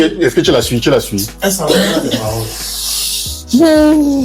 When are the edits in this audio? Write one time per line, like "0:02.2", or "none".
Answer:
none